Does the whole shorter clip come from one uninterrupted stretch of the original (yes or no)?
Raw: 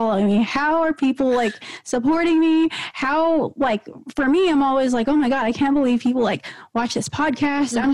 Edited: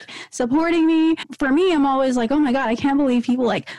no